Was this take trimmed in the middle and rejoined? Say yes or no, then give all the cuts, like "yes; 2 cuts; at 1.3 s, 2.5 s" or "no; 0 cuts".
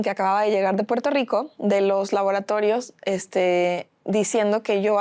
no; 0 cuts